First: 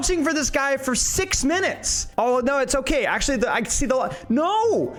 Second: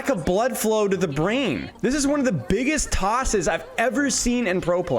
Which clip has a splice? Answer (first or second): second